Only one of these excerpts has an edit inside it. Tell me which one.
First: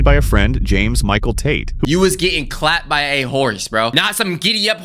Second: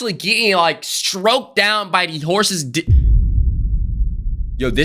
first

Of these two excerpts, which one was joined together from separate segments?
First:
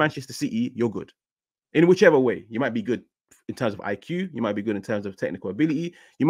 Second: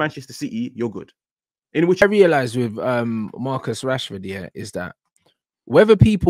second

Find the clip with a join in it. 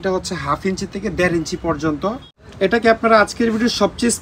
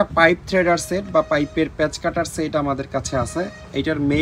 first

